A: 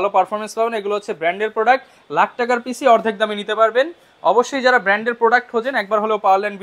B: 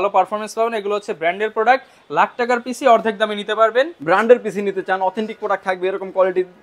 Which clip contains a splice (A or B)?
B